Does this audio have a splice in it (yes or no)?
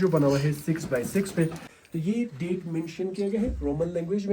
yes